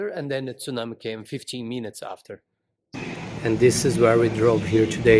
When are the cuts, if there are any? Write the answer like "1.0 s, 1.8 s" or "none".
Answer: 2.9 s